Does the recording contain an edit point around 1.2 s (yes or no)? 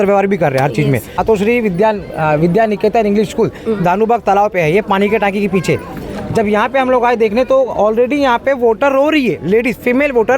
yes